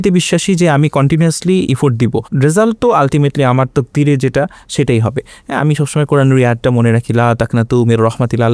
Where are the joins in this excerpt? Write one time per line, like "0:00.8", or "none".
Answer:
0:02.3